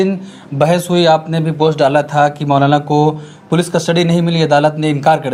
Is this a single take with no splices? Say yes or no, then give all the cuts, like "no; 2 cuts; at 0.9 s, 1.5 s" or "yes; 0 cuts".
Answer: yes; 0 cuts